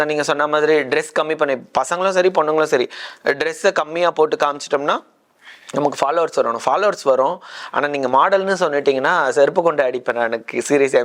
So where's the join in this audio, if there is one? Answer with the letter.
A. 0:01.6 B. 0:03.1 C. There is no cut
C